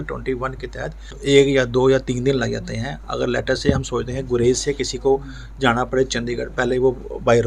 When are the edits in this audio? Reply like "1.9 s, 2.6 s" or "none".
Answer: 1.1 s